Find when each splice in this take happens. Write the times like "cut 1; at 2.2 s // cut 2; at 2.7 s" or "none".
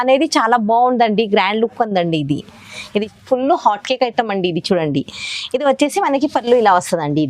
cut 1; at 2.9 s